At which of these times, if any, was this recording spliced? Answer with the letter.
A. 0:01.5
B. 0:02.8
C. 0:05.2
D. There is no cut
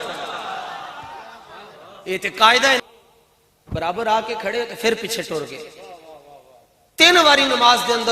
B